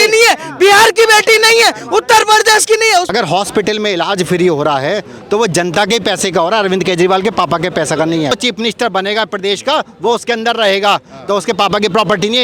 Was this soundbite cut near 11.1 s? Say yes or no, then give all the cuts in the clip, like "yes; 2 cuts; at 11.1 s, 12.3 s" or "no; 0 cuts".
no; 2 cuts; at 3.1 s, 8.3 s